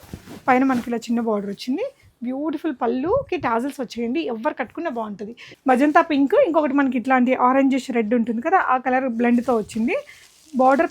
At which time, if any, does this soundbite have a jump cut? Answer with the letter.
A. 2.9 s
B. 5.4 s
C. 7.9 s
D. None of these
B